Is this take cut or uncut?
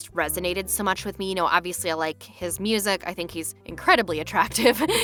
uncut